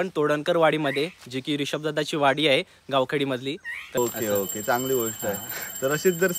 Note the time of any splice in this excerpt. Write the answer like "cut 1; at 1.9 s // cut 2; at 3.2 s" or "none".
cut 1; at 4.0 s